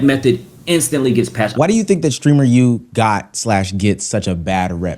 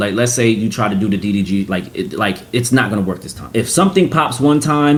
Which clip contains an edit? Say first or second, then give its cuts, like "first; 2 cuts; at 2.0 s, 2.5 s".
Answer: first; 1 cut; at 1.5 s